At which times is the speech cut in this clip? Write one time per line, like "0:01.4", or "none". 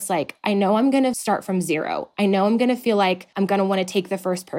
0:01.2
0:03.3

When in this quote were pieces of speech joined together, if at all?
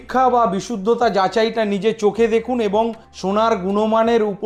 none

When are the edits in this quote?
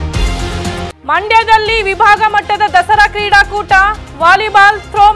none

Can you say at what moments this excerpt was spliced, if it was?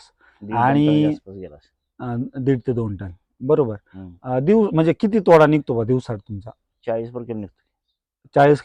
none

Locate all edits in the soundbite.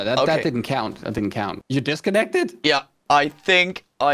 0:01.1
0:03.0

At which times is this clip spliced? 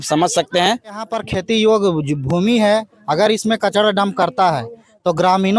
0:01.3

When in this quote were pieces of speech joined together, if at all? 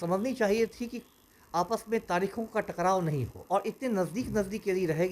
0:03.3

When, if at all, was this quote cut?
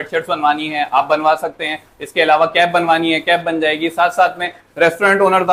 none

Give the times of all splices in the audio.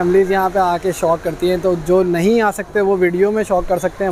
none

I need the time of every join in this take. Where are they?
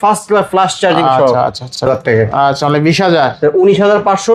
0:01.8

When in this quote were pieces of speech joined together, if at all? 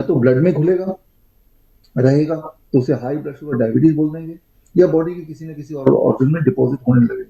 none

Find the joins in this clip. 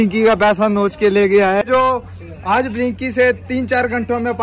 0:01.6

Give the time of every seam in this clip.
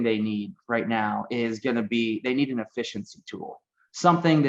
none

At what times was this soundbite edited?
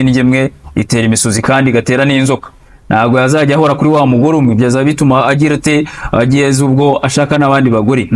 none

